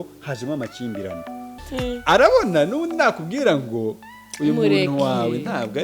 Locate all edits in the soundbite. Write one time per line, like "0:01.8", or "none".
0:01.6